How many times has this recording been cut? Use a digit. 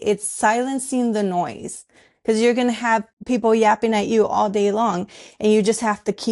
1